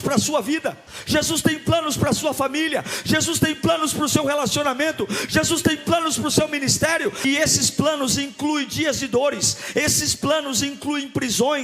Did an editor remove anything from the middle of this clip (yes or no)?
yes